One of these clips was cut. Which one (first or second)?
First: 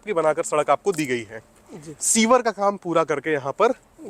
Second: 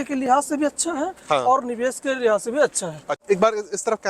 second